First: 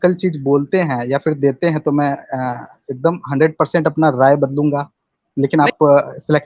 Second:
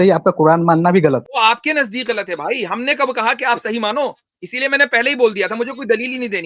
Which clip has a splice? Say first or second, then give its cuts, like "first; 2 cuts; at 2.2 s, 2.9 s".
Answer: second; 1 cut; at 1.3 s